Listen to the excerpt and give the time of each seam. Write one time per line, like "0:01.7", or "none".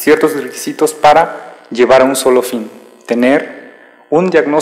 0:01.4